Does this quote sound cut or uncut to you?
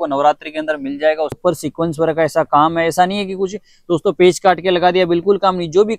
cut